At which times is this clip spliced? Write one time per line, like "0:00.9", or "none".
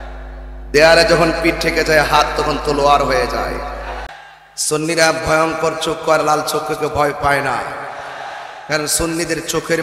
0:04.0

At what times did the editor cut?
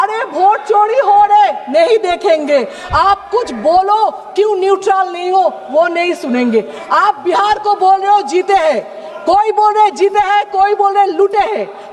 0:06.8

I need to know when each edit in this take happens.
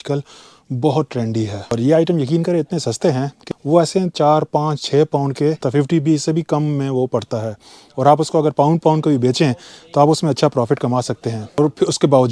0:01.8
0:03.4
0:05.6
0:11.6

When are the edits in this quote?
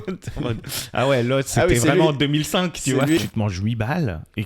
0:03.2

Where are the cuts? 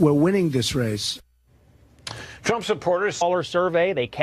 none

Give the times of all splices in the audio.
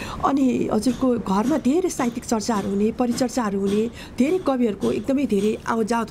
none

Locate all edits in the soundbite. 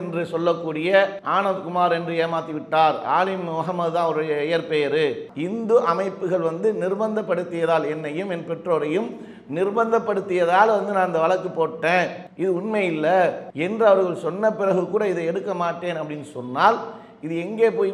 0:01.2
0:05.2
0:12.2
0:13.5

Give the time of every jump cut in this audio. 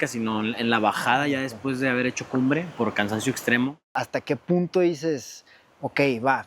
0:03.9

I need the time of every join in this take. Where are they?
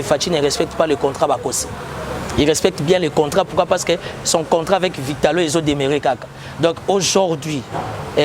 none

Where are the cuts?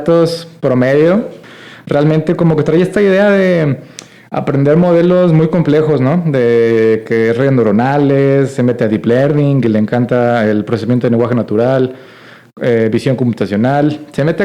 0:01.4

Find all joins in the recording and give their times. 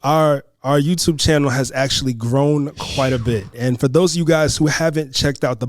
0:03.5

